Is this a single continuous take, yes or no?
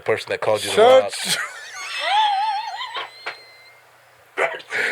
yes